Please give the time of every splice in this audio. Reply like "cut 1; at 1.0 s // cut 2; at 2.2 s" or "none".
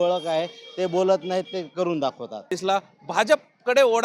cut 1; at 2.5 s